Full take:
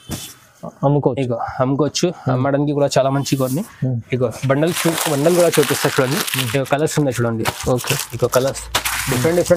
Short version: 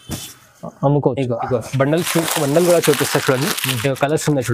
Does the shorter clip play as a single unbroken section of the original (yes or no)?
no